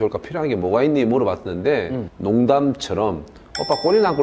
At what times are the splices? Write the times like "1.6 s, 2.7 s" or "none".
2.1 s